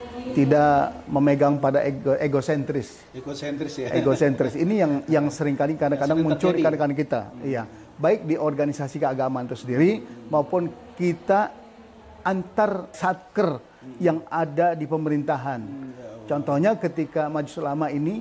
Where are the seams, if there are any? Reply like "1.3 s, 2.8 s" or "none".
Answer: 13.0 s